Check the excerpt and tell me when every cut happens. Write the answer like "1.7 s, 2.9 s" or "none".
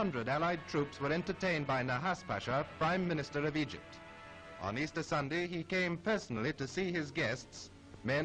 5.2 s